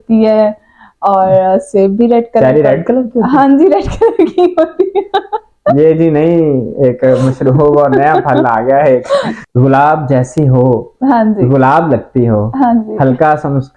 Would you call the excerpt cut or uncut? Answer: cut